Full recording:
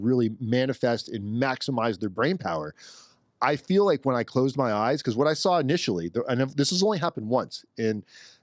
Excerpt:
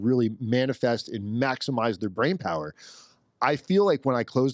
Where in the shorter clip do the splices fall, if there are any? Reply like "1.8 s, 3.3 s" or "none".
none